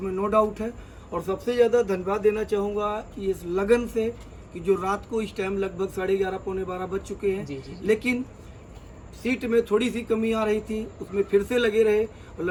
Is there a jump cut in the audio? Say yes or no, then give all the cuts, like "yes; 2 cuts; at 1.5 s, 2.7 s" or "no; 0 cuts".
no; 0 cuts